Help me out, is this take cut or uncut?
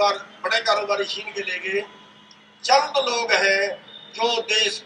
uncut